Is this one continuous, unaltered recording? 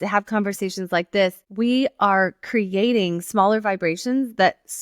no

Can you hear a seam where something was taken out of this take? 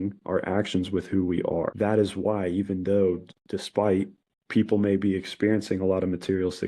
yes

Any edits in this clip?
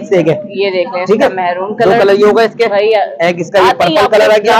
no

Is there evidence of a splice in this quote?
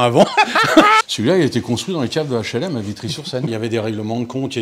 yes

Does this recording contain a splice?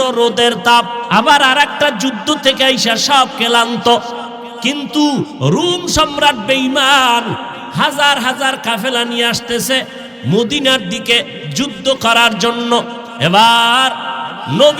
yes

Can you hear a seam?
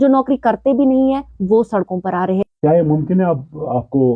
yes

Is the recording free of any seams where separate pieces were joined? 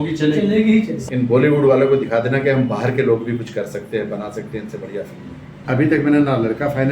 no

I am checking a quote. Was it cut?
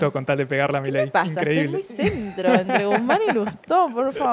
no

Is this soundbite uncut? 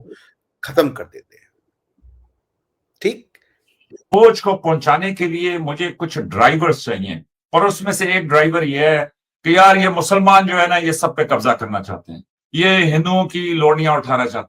no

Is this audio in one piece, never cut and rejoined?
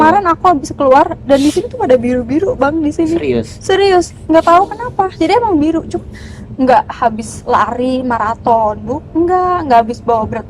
yes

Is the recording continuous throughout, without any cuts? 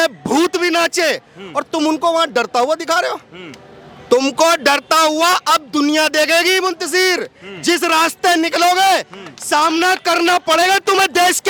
yes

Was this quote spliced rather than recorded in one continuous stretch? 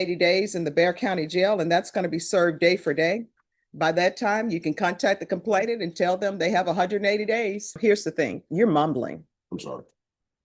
yes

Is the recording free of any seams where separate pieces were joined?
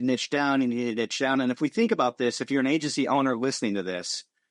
yes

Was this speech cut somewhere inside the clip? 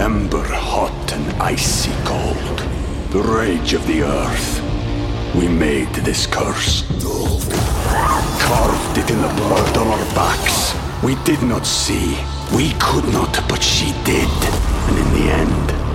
no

